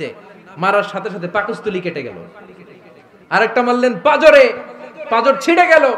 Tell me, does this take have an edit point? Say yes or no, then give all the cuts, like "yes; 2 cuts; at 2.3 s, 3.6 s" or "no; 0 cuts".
no; 0 cuts